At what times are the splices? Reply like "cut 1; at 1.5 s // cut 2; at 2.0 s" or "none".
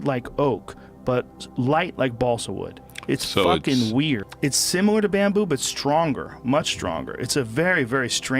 cut 1; at 4.2 s